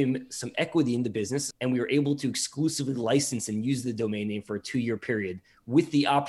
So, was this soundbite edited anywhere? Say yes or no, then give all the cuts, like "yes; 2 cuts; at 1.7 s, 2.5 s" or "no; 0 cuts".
yes; 1 cut; at 1.5 s